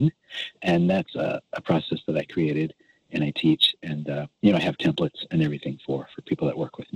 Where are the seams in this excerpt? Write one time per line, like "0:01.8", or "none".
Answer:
none